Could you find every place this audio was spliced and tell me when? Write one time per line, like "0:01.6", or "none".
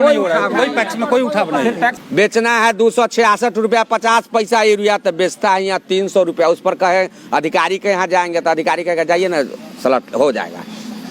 0:02.0